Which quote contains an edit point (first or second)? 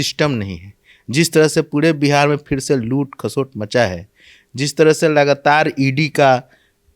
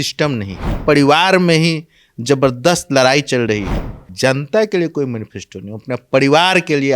second